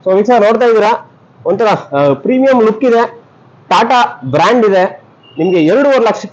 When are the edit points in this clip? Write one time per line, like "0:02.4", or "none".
none